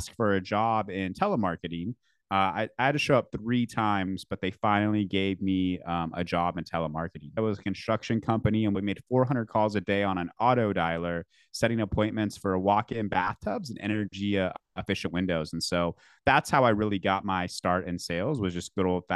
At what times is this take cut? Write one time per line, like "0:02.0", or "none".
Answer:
0:07.4
0:08.8